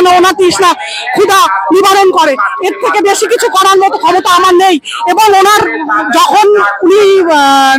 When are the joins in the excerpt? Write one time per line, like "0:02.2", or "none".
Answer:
none